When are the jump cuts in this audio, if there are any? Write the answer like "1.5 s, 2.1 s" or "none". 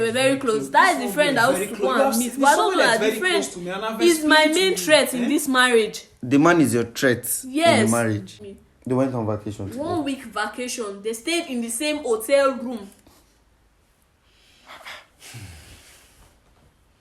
8.3 s